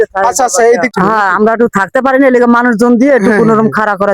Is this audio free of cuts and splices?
no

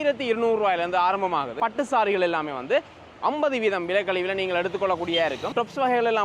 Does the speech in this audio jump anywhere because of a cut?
yes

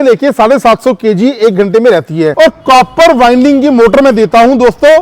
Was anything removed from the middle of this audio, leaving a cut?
yes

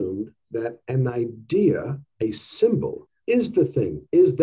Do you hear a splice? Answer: yes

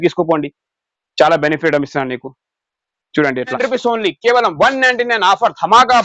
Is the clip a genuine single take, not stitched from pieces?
no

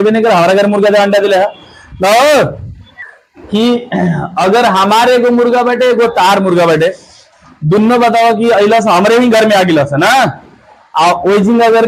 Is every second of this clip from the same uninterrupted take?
yes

